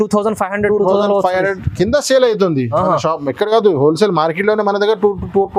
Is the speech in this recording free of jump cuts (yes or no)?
yes